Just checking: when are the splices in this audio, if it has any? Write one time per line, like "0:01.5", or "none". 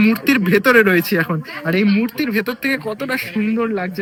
none